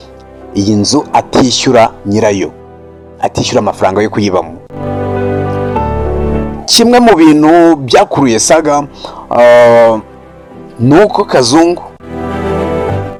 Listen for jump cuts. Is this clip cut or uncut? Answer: uncut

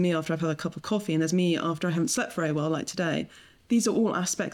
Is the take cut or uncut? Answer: cut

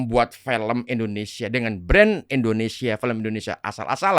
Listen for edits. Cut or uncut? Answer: uncut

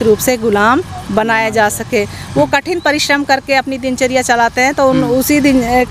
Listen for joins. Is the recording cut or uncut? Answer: uncut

